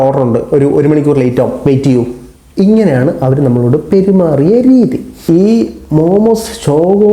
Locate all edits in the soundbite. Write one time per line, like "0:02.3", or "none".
0:05.1